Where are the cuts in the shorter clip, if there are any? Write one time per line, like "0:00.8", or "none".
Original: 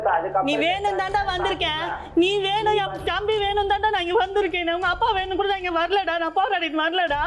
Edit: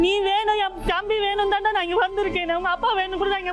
none